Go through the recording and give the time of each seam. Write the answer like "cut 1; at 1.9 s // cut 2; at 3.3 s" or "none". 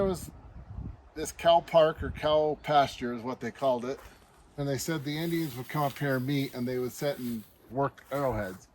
cut 1; at 4.6 s // cut 2; at 7.7 s